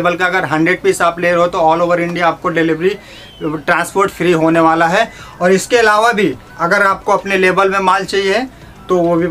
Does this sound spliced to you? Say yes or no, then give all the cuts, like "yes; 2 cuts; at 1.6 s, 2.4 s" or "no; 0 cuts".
no; 0 cuts